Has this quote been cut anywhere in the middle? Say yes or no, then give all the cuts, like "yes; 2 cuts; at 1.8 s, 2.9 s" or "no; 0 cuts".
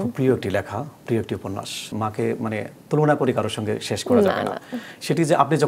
yes; 1 cut; at 1.9 s